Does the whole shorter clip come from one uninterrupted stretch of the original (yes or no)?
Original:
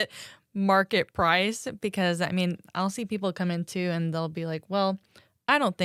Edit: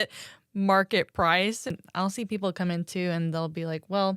no